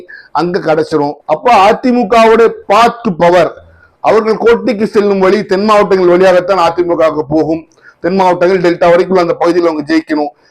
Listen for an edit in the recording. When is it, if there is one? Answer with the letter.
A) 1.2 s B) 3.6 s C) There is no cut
A